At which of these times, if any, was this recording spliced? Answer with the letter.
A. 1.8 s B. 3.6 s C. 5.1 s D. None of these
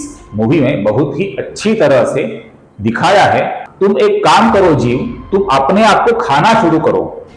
B